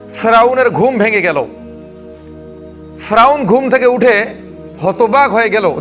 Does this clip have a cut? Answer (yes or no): no